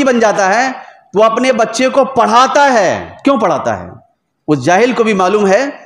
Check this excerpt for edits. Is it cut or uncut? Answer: cut